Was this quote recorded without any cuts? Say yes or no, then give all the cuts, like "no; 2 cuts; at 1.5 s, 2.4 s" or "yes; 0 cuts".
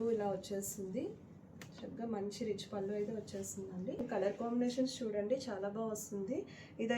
no; 1 cut; at 4.0 s